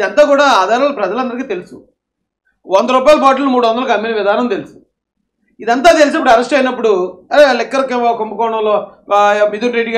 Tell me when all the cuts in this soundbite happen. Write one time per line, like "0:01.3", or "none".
none